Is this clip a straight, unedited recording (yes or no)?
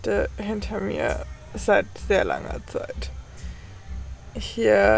yes